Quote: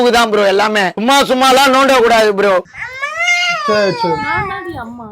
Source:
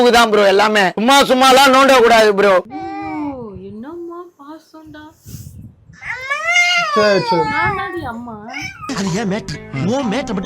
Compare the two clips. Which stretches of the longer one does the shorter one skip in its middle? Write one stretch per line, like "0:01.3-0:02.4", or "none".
0:02.8-0:06.1